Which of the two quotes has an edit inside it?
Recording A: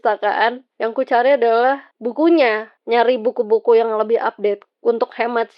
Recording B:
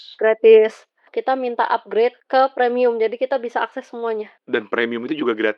B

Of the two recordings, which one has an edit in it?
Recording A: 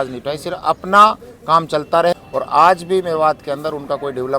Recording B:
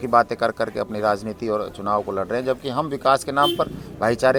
A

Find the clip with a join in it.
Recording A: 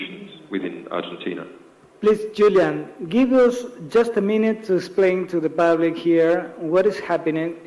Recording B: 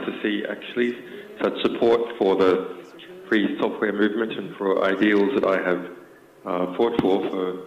B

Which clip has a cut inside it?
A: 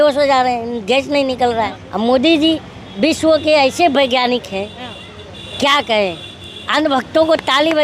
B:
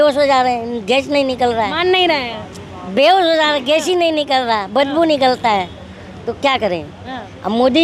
A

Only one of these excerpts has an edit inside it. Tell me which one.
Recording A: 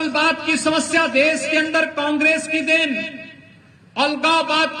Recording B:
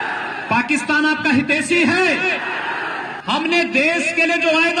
B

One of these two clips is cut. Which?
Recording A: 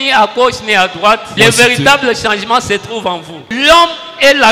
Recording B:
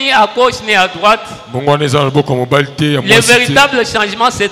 A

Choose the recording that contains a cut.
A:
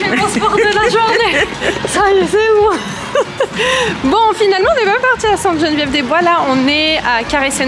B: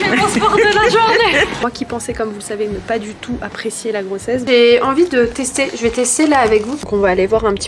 B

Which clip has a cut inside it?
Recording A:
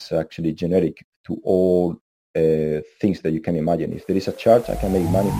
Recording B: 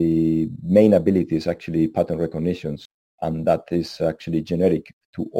B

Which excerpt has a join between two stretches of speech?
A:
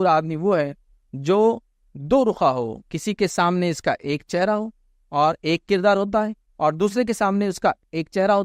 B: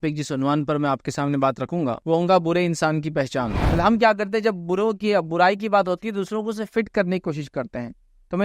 B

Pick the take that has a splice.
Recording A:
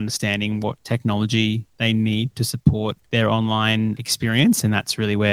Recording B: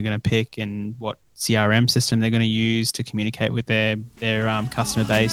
A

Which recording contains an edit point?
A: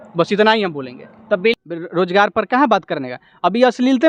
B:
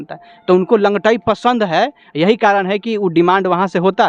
A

